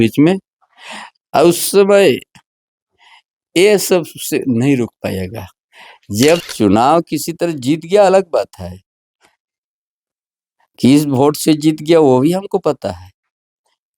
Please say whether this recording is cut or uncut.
cut